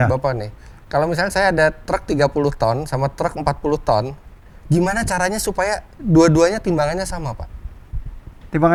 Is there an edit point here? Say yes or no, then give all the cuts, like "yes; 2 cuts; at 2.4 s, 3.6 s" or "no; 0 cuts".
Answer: no; 0 cuts